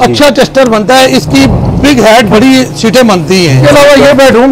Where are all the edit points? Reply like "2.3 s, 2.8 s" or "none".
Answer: 3.6 s